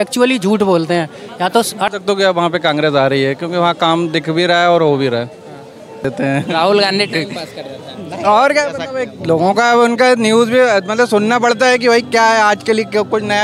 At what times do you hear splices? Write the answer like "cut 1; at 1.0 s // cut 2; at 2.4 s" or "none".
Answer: cut 1; at 1.9 s // cut 2; at 6.0 s